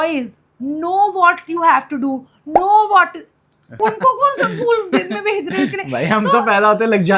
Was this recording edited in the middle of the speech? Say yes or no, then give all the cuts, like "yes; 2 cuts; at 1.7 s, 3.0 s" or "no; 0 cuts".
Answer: yes; 1 cut; at 3.6 s